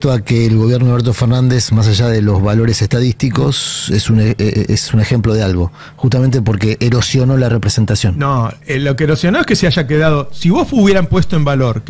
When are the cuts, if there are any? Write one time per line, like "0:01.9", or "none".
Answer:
none